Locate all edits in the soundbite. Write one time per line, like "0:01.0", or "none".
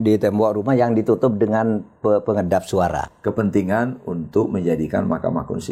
0:03.0